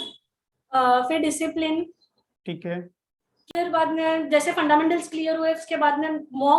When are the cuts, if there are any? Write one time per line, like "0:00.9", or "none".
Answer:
0:03.5